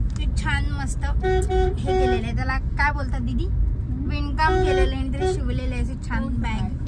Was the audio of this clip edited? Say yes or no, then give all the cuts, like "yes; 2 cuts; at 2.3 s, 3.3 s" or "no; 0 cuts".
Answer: no; 0 cuts